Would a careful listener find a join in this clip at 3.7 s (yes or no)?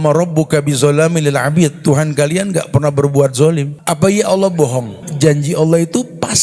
yes